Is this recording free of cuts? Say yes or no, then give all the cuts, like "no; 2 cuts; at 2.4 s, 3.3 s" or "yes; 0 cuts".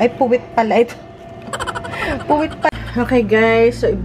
no; 1 cut; at 2.7 s